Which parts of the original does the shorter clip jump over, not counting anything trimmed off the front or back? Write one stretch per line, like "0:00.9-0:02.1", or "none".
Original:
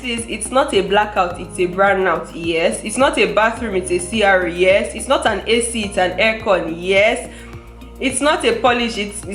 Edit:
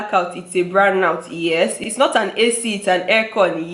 0:02.9-0:04.9